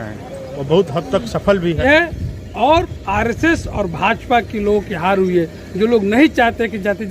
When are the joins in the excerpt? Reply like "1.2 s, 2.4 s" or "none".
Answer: 1.8 s

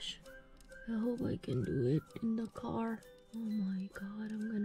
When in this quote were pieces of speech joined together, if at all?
3.2 s

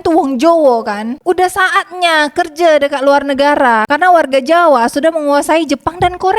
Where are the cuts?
1.1 s

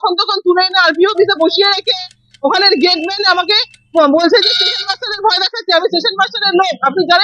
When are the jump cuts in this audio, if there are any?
none

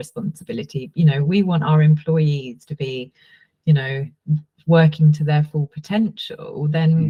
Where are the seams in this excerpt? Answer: none

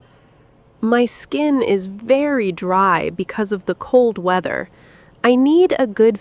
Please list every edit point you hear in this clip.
none

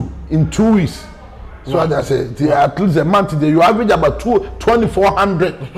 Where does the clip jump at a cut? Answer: none

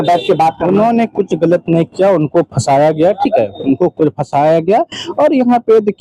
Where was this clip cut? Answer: none

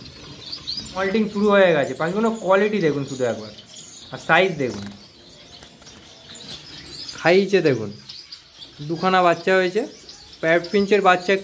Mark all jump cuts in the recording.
1.0 s, 6.5 s

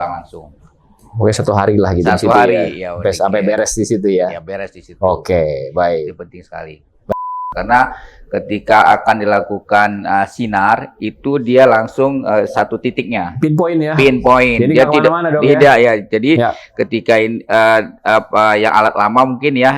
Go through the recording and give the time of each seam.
7.3 s

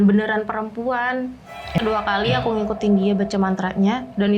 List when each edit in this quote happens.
1.8 s

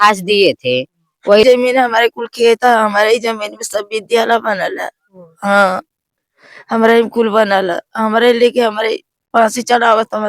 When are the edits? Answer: 1.4 s

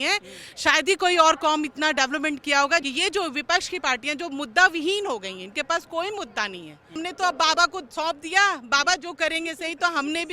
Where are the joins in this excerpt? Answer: 2.8 s, 7.0 s

